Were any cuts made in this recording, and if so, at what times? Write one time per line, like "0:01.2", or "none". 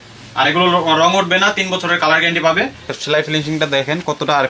0:02.9